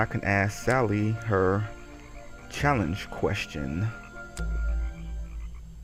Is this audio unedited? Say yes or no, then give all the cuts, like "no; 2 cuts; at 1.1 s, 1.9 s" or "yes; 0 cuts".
yes; 0 cuts